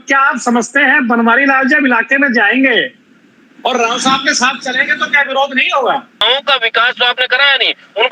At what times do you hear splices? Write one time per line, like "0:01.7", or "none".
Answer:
0:06.2